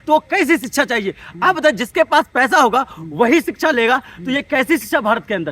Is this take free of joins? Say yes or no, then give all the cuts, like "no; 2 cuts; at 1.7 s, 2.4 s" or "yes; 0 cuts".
yes; 0 cuts